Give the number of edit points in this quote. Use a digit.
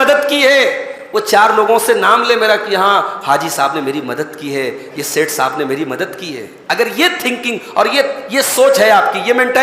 0